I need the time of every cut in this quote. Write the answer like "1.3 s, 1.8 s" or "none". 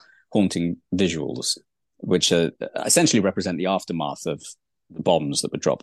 none